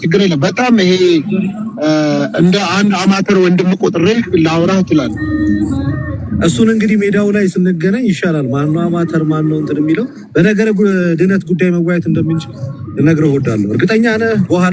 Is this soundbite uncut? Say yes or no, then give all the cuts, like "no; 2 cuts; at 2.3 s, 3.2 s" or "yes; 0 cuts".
yes; 0 cuts